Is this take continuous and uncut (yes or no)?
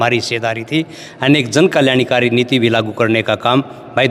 yes